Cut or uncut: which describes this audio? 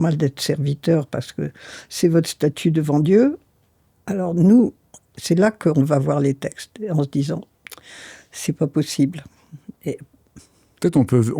uncut